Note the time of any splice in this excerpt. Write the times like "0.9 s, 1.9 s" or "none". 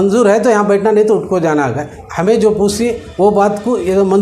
2.0 s